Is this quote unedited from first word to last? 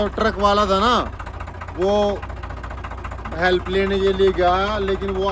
yes; 0 cuts

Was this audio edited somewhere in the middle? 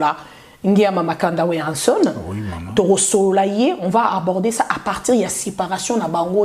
no; 0 cuts

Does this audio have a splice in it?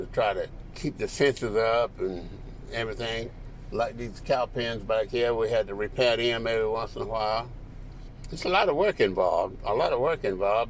no; 0 cuts

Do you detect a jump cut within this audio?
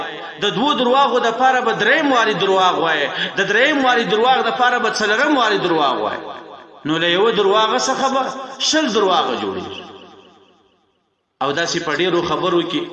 no; 0 cuts

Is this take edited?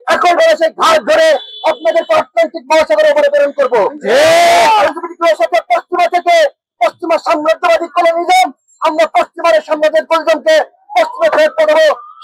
no; 0 cuts

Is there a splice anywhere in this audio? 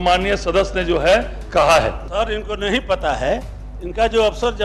yes; 1 cut; at 2.0 s

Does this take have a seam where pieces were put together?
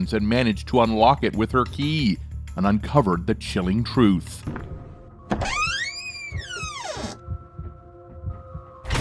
no; 0 cuts

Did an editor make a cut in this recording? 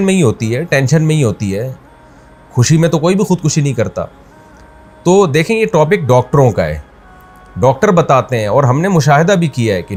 no; 0 cuts

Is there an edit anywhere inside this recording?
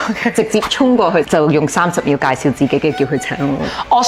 no; 0 cuts

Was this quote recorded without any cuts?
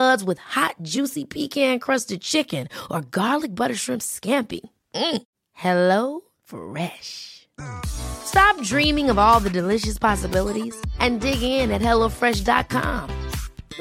yes; 0 cuts

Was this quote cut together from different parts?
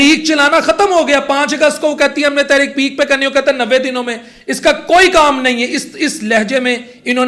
no; 0 cuts

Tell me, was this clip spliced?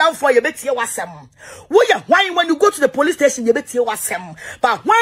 no; 0 cuts

